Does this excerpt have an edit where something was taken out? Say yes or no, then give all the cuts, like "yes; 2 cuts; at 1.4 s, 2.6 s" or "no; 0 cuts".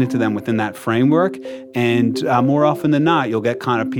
no; 0 cuts